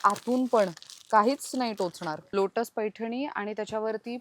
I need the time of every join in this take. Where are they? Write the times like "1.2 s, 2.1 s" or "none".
2.2 s